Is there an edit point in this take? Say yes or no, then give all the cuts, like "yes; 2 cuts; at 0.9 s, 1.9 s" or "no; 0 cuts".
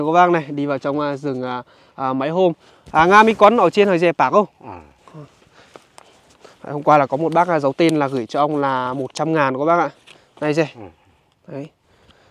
no; 0 cuts